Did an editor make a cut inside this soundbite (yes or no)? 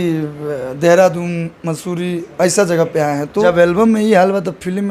yes